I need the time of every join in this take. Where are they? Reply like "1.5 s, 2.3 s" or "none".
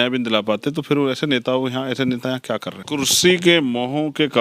2.8 s